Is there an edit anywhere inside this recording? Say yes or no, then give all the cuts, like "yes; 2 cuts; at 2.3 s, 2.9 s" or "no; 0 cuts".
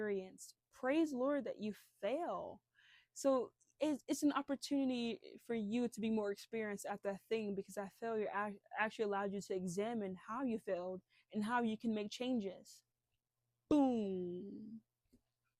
no; 0 cuts